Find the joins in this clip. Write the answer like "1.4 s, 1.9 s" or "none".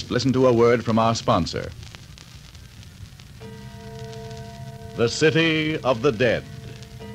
3.8 s